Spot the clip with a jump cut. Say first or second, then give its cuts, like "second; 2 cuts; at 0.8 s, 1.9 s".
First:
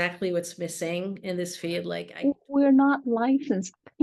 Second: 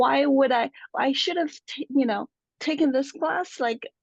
first; 1 cut; at 2.0 s